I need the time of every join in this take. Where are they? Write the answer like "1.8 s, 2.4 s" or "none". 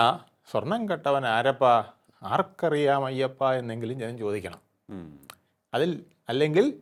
none